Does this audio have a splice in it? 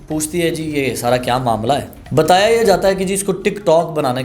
yes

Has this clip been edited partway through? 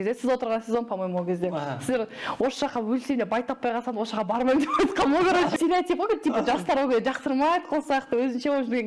yes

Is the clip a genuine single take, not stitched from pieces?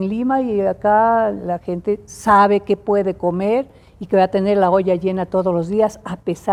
yes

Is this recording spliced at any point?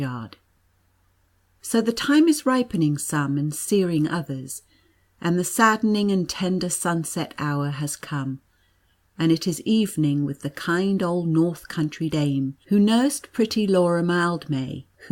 yes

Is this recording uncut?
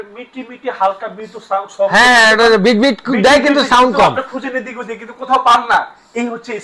yes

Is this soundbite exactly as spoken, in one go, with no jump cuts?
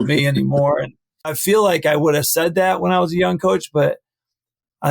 no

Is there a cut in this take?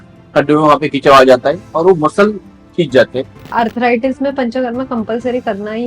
yes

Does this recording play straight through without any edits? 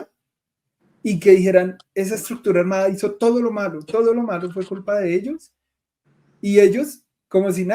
yes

